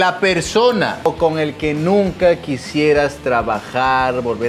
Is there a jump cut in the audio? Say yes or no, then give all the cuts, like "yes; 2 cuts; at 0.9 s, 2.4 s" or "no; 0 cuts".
yes; 1 cut; at 1.1 s